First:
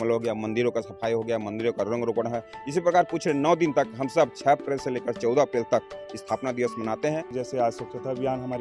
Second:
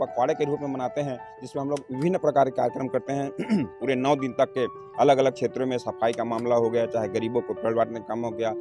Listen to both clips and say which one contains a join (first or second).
first